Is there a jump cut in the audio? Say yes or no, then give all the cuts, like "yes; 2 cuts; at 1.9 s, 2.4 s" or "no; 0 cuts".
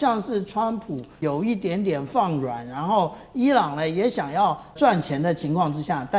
yes; 2 cuts; at 1.2 s, 4.7 s